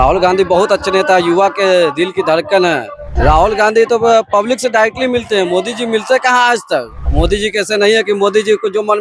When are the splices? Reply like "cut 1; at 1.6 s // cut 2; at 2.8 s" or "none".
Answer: cut 1; at 3.1 s // cut 2; at 7.0 s